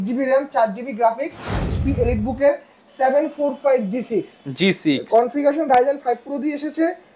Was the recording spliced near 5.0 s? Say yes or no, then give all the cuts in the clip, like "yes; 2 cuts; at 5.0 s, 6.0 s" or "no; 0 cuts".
no; 1 cut; at 1.6 s